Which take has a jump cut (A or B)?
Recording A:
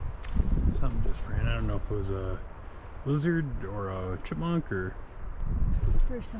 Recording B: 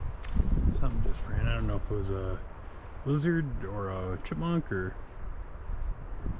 A